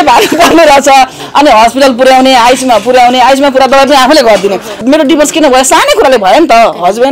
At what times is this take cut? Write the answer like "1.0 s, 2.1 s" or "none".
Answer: 4.8 s

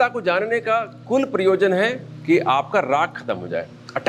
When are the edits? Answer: none

